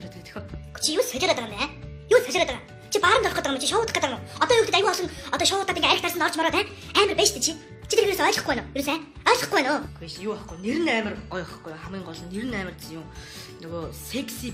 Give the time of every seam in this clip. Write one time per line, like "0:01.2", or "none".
none